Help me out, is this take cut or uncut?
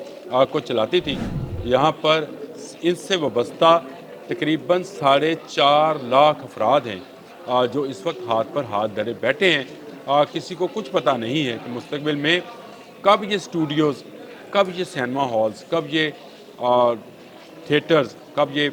uncut